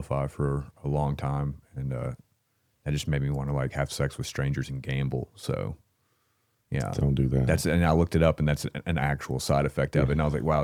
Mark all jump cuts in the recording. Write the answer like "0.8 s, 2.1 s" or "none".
none